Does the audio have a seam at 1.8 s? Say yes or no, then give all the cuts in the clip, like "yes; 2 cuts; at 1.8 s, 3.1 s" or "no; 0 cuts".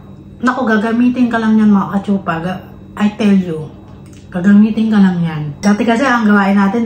no; 1 cut; at 5.4 s